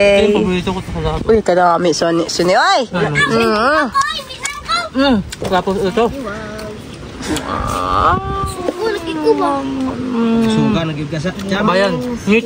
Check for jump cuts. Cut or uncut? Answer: uncut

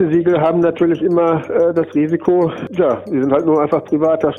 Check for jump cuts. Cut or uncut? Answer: cut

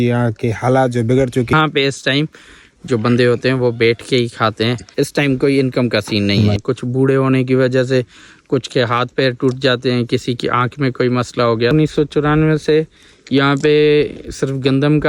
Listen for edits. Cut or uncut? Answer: cut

